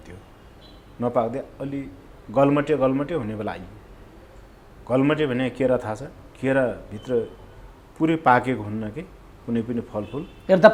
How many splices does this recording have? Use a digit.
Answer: 0